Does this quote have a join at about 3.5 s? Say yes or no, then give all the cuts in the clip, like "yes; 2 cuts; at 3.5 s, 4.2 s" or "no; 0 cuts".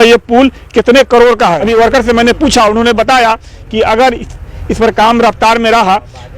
no; 1 cut; at 1.6 s